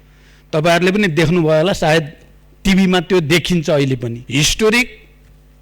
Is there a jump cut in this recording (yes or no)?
yes